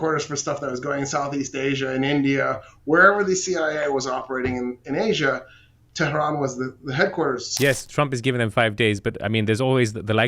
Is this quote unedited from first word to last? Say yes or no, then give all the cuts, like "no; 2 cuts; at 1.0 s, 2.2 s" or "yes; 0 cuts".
no; 1 cut; at 7.5 s